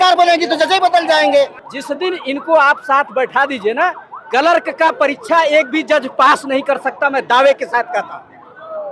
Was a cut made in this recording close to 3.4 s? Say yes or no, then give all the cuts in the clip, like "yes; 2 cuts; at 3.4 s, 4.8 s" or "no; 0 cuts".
no; 1 cut; at 1.6 s